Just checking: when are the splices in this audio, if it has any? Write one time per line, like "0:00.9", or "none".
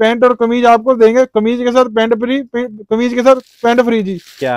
none

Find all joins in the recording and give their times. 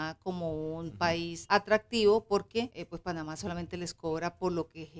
0:01.4
0:02.8

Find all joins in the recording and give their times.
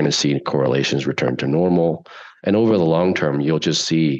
none

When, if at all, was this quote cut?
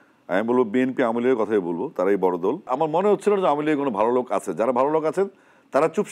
0:02.7

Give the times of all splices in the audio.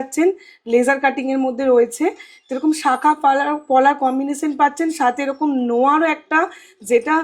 none

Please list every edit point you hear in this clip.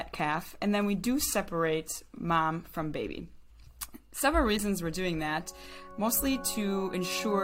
none

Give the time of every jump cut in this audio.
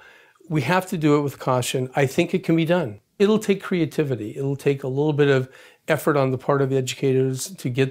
0:03.2

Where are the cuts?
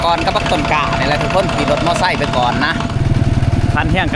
0:03.1

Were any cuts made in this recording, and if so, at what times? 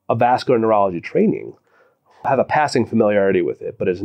0:02.3

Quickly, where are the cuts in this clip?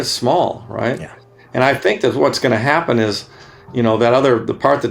none

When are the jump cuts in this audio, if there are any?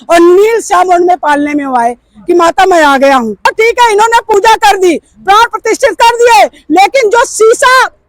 0:03.5

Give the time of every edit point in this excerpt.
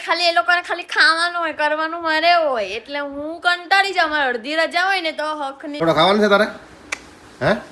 0:05.8

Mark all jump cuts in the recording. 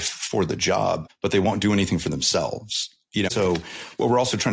0:01.1
0:03.3

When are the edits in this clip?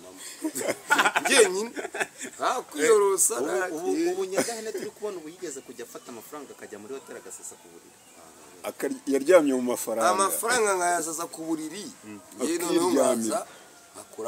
none

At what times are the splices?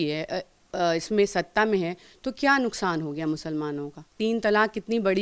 0:04.1

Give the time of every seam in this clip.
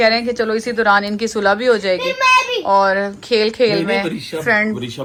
none

